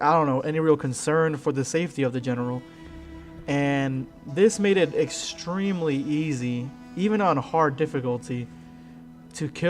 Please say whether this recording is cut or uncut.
cut